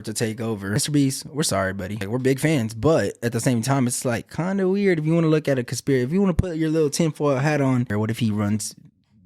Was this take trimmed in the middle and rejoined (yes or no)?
yes